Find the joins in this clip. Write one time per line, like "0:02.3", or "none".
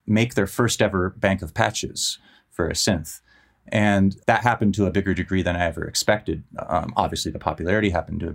0:04.2